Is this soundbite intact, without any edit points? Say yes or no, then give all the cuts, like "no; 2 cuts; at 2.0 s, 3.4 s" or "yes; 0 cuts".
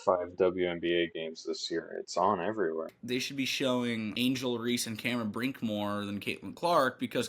no; 2 cuts; at 3.0 s, 4.1 s